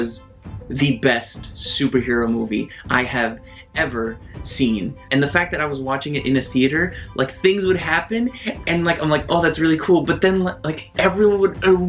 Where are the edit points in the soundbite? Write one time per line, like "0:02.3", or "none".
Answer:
0:05.0